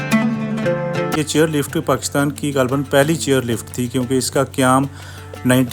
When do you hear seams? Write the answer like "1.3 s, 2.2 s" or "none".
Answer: 1.1 s